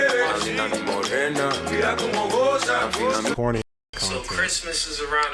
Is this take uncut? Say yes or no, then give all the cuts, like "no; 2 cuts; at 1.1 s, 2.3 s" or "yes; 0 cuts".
yes; 0 cuts